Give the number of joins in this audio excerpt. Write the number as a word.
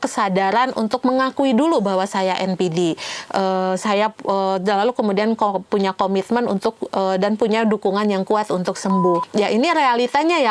one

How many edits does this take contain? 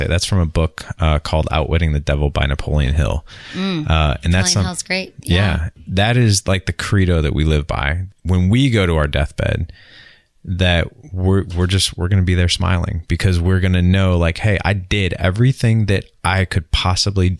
two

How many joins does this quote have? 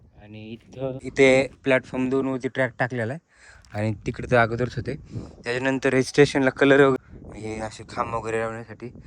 two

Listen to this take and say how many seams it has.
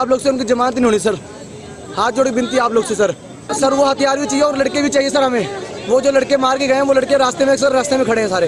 one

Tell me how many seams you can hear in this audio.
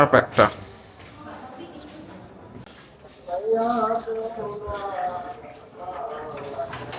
zero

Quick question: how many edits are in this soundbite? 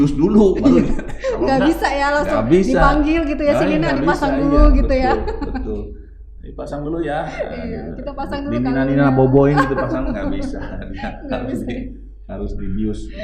zero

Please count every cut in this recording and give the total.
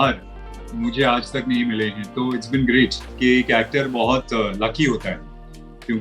one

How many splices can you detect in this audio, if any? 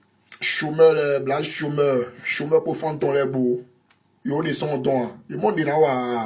zero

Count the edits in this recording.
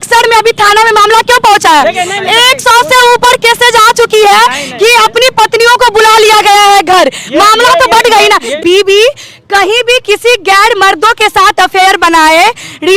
one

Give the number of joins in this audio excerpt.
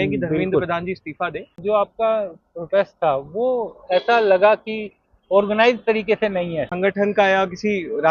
two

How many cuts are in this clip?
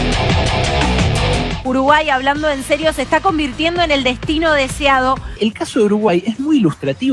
two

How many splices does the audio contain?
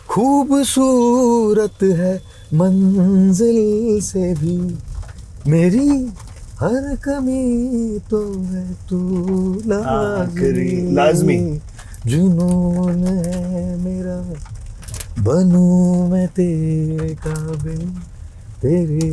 zero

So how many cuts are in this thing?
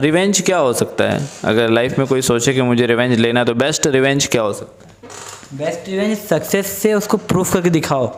zero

